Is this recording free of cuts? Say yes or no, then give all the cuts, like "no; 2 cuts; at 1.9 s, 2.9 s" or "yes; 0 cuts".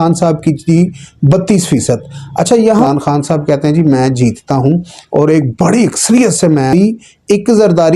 no; 2 cuts; at 2.8 s, 6.7 s